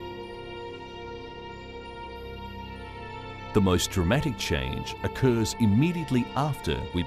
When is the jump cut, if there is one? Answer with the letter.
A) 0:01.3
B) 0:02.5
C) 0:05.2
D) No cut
D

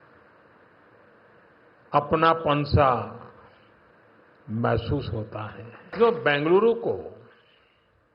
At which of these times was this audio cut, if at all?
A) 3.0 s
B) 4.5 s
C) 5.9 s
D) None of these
C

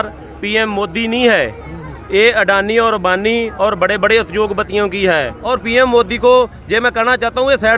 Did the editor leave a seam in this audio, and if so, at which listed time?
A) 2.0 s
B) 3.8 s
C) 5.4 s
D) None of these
C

